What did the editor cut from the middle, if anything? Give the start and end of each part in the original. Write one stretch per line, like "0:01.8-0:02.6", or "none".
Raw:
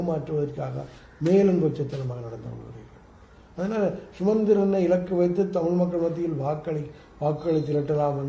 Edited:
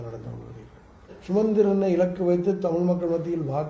0:03.3-0:04.1